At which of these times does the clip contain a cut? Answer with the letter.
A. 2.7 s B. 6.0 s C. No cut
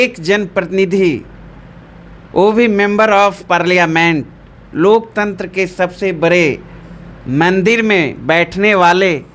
C